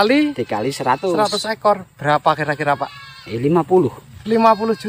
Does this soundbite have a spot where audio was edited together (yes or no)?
no